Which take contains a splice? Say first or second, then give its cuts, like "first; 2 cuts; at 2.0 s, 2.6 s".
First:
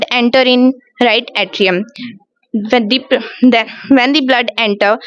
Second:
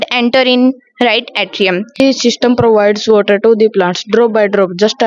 second; 1 cut; at 2.0 s